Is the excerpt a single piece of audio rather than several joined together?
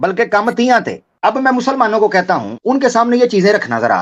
no; 2 cuts; at 1.0 s, 2.5 s

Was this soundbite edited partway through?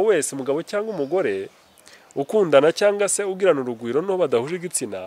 no; 0 cuts

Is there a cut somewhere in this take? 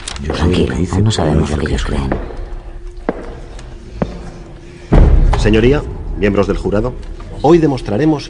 no; 0 cuts

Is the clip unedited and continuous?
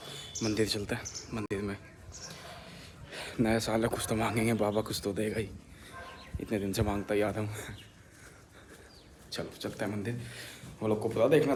yes; 0 cuts

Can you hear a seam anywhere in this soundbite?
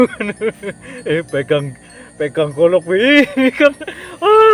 yes; 1 cut; at 3.6 s

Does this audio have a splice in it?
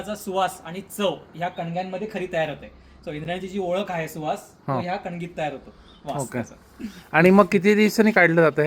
no; 0 cuts

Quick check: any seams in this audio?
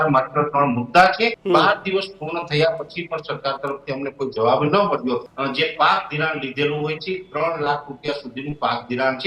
yes; 2 cuts; at 1.4 s, 5.3 s

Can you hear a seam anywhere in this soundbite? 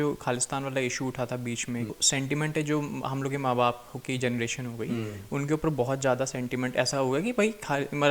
yes; 1 cut; at 2.0 s

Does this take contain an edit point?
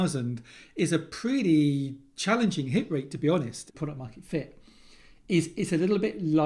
yes; 1 cut; at 3.7 s

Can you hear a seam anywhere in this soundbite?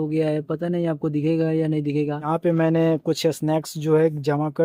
yes; 1 cut; at 2.2 s

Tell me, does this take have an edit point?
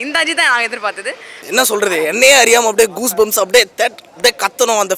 yes; 1 cut; at 1.4 s

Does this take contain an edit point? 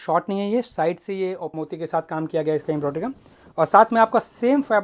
yes; 1 cut; at 1.5 s

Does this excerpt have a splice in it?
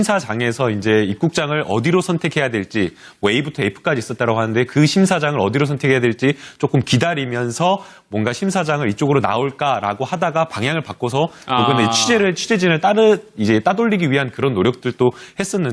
no; 0 cuts

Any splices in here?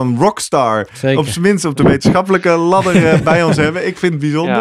no; 0 cuts

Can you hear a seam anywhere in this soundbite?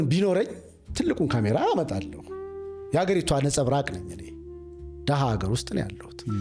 no; 0 cuts

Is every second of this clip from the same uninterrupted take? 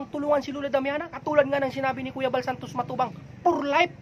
no; 1 cut; at 1.1 s

